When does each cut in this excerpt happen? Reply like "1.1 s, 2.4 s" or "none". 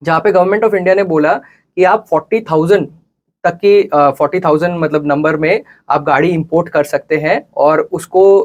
none